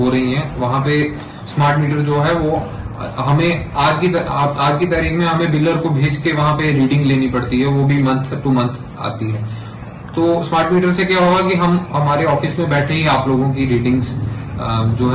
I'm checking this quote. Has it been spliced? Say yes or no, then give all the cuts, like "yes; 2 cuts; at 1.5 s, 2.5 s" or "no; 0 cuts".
no; 0 cuts